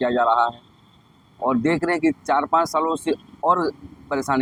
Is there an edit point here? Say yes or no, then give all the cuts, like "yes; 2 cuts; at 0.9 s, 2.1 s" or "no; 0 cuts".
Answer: no; 0 cuts